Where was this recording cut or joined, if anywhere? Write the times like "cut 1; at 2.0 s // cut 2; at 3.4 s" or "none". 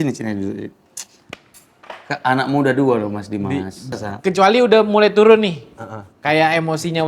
cut 1; at 3.9 s